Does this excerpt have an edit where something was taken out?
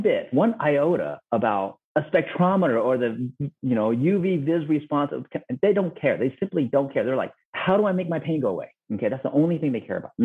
no; 0 cuts

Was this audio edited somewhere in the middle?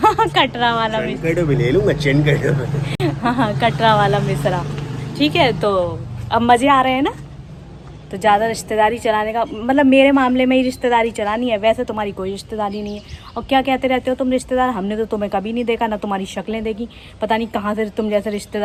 no; 0 cuts

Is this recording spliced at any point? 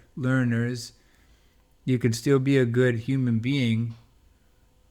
no; 0 cuts

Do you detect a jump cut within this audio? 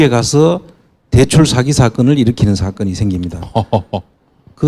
yes; 1 cut; at 2.8 s

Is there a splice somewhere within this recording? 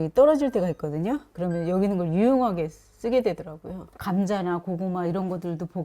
yes; 1 cut; at 3.9 s

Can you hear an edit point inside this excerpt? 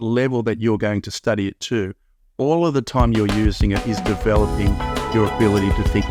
no; 0 cuts

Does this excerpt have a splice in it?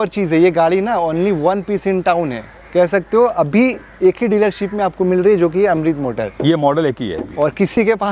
no; 0 cuts

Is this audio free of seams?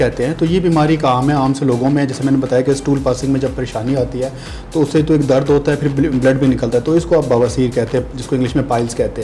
yes; 0 cuts

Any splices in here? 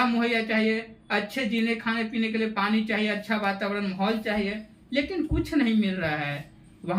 no; 0 cuts

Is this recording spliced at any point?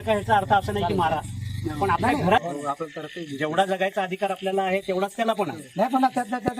yes; 1 cut; at 2.4 s

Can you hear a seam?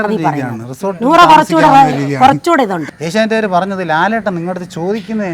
yes; 1 cut; at 2.9 s

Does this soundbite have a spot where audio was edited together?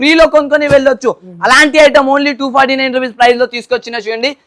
no; 0 cuts

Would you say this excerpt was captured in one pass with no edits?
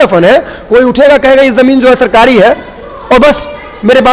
yes; 0 cuts

